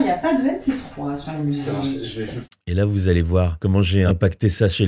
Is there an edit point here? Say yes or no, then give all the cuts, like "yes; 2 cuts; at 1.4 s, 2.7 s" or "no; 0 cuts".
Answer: no; 0 cuts